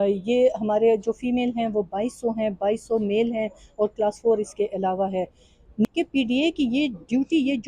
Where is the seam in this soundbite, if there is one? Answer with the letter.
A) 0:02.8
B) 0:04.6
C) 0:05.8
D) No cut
C